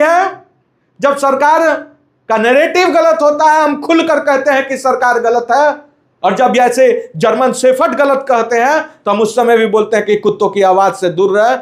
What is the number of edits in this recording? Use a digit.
0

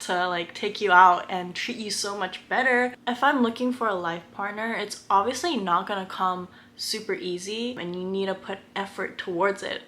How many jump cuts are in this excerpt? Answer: 2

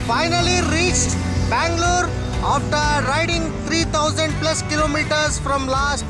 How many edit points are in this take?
0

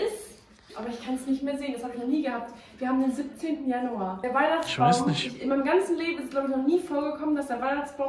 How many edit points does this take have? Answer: 0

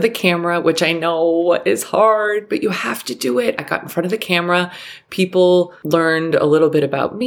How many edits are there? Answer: 1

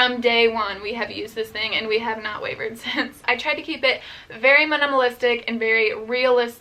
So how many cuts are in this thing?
1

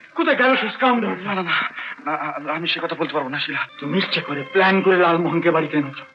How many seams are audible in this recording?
1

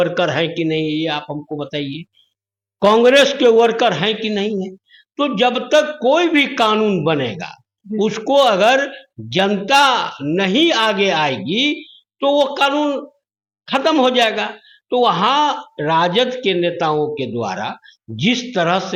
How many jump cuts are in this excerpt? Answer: 0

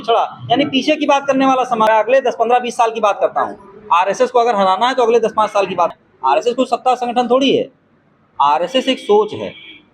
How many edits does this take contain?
2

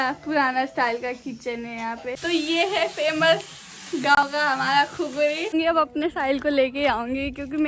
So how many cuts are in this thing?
2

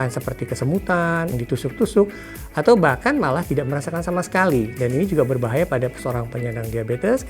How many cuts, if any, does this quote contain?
1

